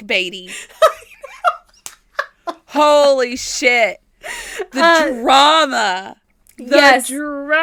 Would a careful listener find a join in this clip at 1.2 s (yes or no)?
no